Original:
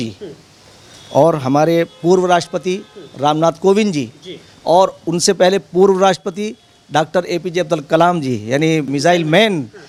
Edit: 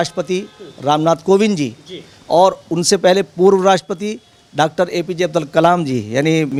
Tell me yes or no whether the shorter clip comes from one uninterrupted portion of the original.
yes